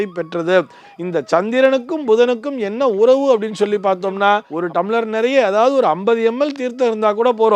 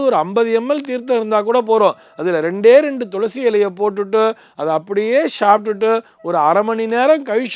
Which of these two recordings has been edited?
first; 1 cut; at 4.5 s

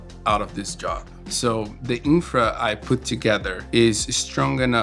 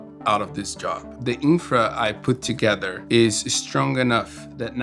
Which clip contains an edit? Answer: second; 1 cut; at 1.1 s

